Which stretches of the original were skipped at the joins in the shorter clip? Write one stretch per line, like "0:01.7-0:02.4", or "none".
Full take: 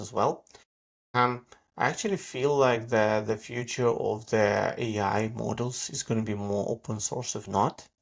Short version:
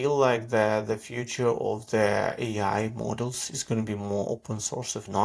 none

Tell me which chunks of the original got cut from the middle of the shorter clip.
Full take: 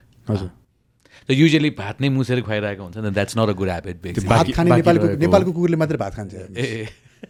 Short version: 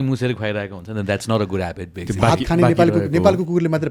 none

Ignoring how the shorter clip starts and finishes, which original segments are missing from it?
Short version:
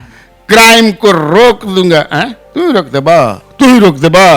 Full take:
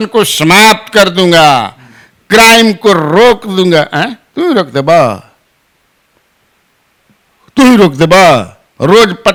0:05.2-0:07.4

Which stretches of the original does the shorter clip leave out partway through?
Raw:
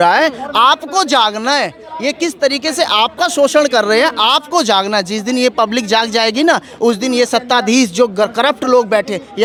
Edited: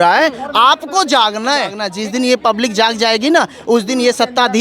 0:01.9-0:05.0

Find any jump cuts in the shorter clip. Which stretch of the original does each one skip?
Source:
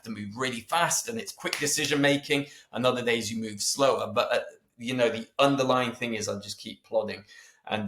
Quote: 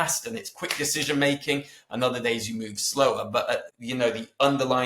0:04.6-0:04.8

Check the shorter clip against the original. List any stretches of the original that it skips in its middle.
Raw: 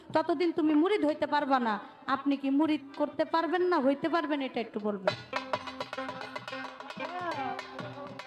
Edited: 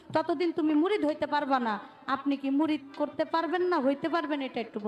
none

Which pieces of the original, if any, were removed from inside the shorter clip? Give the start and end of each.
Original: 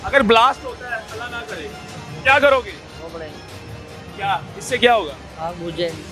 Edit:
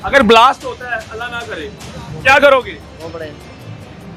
none

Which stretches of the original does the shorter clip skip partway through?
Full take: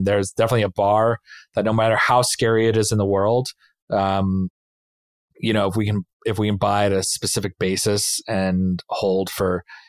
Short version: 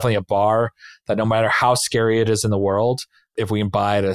0:03.7-0:06.1

